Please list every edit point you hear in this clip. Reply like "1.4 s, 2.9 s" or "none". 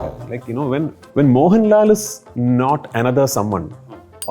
1.0 s